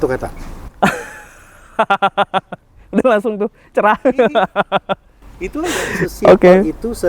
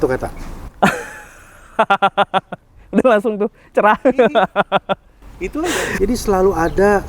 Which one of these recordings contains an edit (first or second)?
second